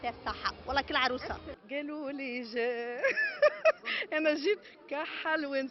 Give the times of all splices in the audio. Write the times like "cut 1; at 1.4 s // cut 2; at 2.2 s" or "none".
cut 1; at 1.5 s